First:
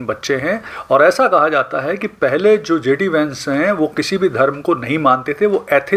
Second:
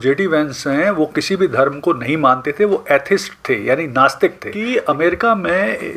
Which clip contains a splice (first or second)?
second